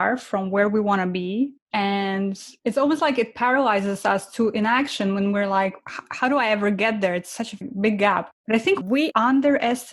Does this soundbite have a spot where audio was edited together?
yes; 3 cuts; at 1.6 s, 2.5 s, 8.9 s

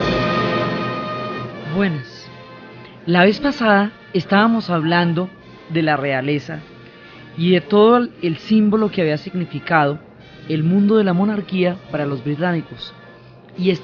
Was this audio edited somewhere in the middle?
no; 0 cuts

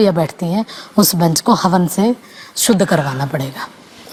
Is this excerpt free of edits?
yes; 0 cuts

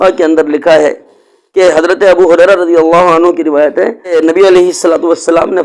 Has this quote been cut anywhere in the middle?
yes; 1 cut; at 4.1 s

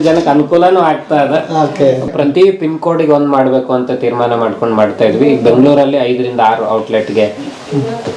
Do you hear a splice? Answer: yes; 1 cut; at 2.1 s

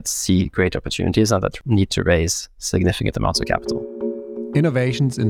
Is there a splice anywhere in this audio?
yes; 2 cuts; at 1.6 s, 4.0 s

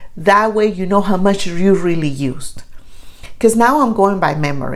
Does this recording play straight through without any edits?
yes; 0 cuts

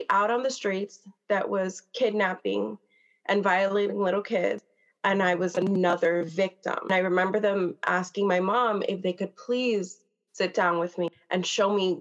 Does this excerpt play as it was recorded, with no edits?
yes; 0 cuts

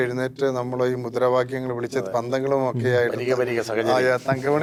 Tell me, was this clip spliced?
no; 0 cuts

